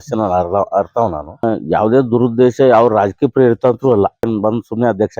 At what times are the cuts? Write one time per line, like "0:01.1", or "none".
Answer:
0:01.4
0:04.3